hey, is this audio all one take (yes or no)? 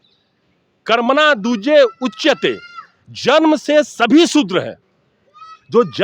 yes